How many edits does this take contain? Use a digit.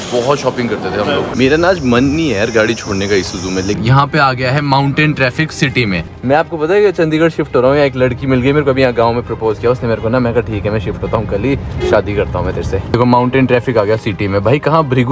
4